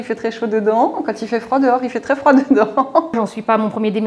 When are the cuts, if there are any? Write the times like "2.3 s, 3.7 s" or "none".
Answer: 3.1 s